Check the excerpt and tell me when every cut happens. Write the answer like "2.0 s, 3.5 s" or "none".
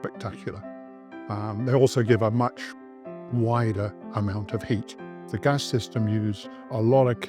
5.3 s